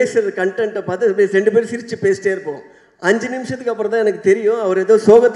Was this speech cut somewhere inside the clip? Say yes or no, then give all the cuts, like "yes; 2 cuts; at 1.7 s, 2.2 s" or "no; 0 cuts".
no; 0 cuts